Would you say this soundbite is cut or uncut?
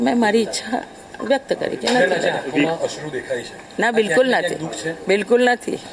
uncut